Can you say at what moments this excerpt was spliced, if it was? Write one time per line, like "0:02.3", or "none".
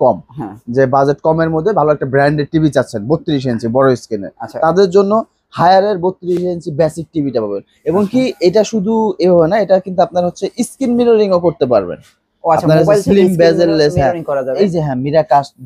none